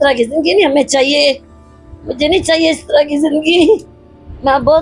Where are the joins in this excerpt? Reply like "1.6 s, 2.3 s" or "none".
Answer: none